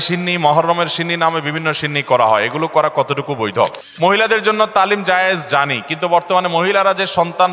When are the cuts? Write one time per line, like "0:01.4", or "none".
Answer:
0:03.8